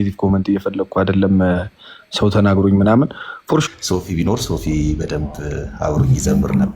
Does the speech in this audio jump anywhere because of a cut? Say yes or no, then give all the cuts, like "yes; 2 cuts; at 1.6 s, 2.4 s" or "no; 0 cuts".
yes; 1 cut; at 3.6 s